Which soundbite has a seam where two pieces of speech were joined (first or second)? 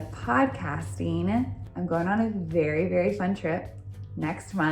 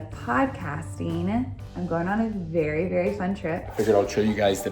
second